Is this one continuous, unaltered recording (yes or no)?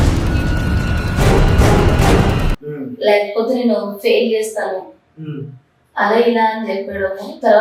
yes